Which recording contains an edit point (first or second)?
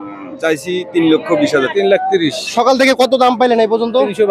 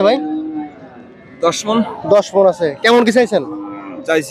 first